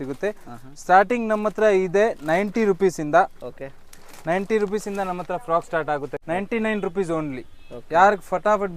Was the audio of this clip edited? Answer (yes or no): yes